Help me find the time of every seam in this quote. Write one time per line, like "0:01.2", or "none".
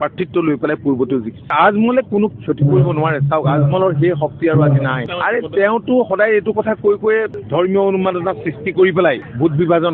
0:01.5